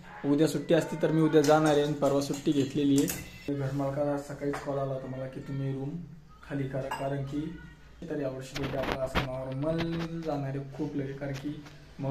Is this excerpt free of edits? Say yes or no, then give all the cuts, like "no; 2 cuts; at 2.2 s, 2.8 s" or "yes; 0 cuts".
no; 2 cuts; at 3.5 s, 8.0 s